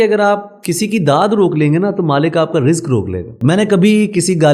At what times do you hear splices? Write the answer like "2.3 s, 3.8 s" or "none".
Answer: 3.3 s